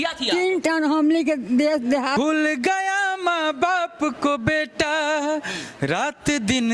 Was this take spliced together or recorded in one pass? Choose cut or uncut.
cut